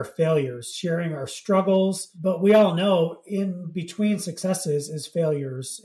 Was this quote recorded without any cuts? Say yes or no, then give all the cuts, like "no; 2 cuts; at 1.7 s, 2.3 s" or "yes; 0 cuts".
no; 1 cut; at 2.1 s